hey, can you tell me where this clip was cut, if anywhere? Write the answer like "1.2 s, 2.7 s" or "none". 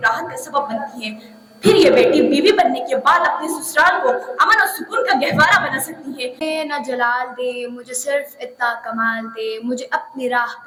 none